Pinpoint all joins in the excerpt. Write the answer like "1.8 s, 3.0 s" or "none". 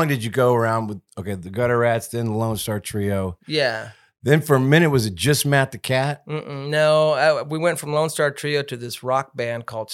none